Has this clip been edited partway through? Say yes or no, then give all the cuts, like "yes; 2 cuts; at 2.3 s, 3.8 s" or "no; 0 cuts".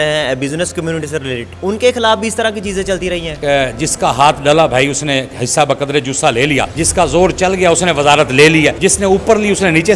yes; 4 cuts; at 1.5 s, 3.3 s, 6.8 s, 8.8 s